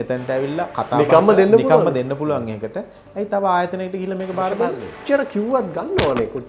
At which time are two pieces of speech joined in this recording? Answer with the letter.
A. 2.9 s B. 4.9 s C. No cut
B